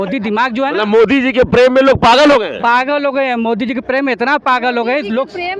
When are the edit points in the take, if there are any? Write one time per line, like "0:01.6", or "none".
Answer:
none